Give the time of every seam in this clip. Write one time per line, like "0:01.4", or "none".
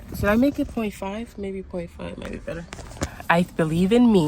0:03.0